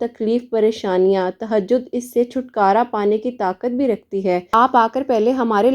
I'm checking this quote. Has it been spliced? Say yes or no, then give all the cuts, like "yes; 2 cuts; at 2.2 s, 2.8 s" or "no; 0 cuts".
yes; 1 cut; at 4.5 s